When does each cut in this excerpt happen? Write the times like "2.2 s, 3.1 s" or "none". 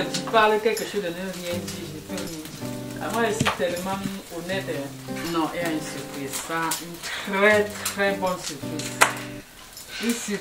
5.0 s